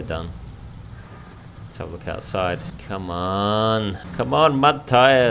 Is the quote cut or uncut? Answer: cut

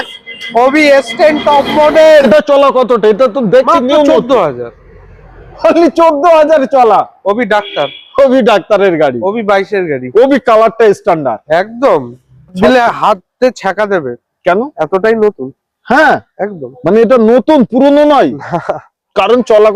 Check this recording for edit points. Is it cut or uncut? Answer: cut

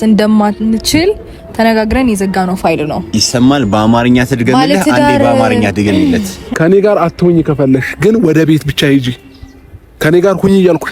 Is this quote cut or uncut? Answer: cut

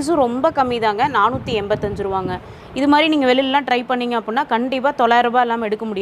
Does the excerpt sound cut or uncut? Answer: uncut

